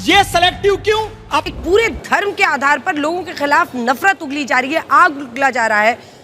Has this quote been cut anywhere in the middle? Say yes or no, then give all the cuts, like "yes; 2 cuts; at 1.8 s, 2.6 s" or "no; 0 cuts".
yes; 1 cut; at 1.4 s